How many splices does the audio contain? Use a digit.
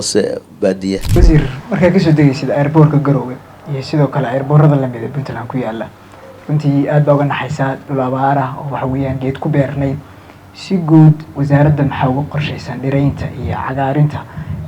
1